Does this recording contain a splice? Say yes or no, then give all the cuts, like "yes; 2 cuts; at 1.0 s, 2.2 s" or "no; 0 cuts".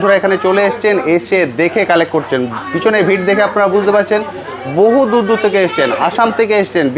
no; 0 cuts